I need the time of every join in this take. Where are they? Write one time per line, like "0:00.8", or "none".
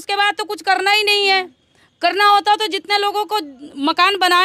none